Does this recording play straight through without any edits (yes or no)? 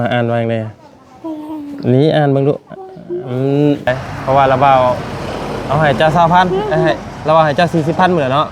no